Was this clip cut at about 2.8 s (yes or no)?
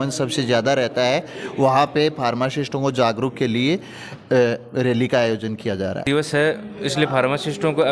no